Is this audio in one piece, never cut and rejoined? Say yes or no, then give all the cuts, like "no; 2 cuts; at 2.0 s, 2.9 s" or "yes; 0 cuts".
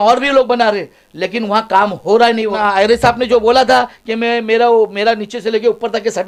no; 1 cut; at 2.5 s